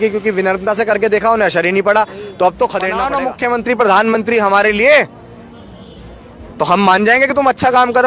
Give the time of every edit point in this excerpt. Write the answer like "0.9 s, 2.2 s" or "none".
3.0 s